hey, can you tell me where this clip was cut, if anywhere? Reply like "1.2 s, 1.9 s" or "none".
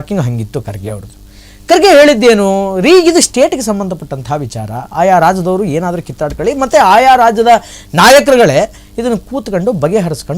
none